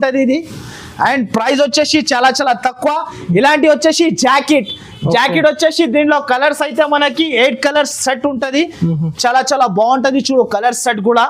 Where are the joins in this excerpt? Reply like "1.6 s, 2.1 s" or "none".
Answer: none